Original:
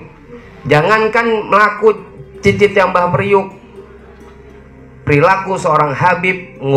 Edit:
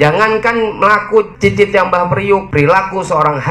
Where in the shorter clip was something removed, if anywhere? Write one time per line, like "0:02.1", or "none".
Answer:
0:01.3
0:02.5